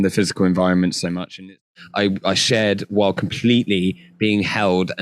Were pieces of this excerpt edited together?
yes; 1 cut; at 1.6 s

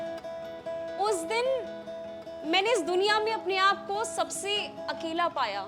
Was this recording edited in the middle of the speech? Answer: no; 0 cuts

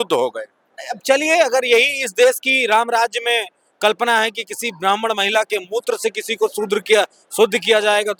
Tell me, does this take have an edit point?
no; 0 cuts

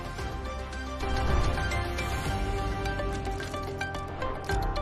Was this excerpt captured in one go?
no; 1 cut; at 1.0 s

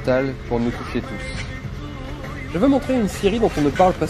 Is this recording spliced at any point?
no; 0 cuts

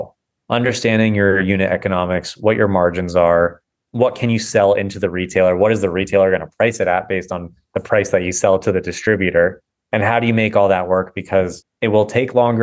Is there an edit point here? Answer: no; 0 cuts

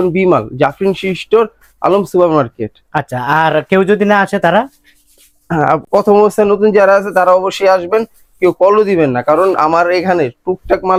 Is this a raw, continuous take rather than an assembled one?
yes; 0 cuts

